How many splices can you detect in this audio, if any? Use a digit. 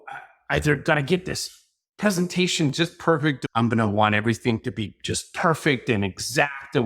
1